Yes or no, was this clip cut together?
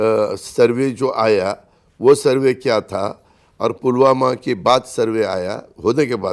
no